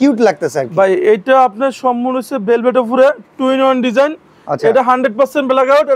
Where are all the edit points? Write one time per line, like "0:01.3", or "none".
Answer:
none

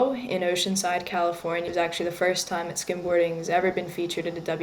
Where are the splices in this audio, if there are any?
0:01.7

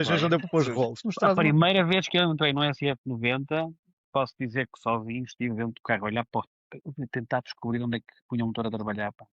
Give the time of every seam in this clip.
0:01.1

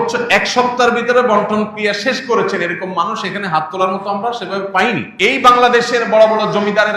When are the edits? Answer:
0:05.1

